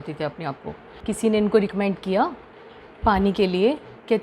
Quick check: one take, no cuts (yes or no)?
no